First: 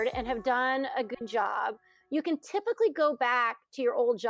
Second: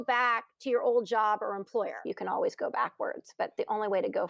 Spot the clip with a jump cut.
second; 1 cut; at 2.1 s

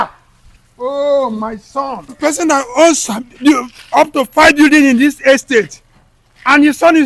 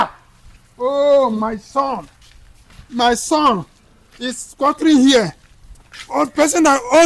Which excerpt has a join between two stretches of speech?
first; 1 cut; at 2.2 s

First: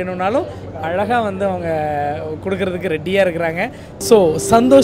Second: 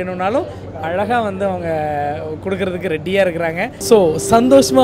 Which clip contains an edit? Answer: second; 1 cut; at 3.7 s

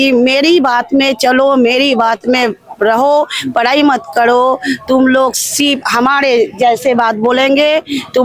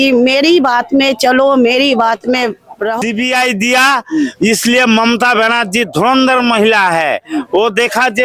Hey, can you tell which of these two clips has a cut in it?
second; 1 cut; at 3.0 s

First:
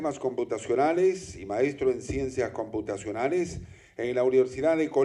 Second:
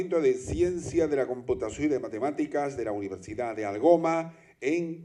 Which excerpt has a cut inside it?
second; 1 cut; at 3.2 s

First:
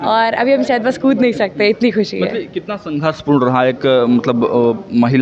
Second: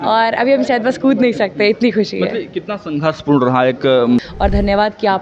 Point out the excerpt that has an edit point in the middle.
second; 1 cut; at 4.2 s

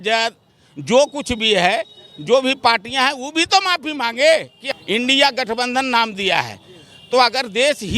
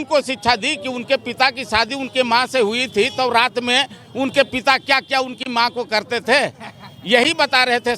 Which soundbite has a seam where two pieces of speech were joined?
first; 1 cut; at 4.7 s

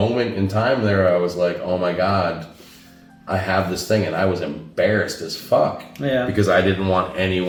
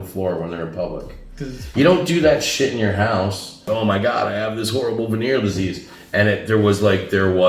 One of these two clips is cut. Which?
second; 1 cut; at 3.7 s

